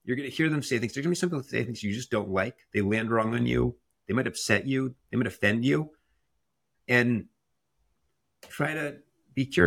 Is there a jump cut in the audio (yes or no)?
no